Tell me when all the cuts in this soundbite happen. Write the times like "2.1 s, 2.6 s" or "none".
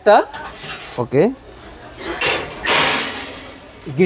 none